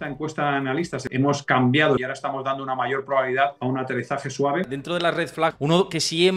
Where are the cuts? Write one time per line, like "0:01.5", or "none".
0:01.0
0:02.0
0:03.6
0:05.3